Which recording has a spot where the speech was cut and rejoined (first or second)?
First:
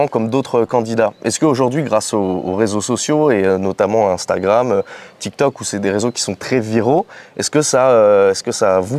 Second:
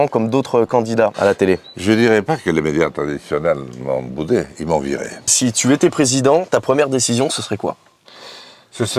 second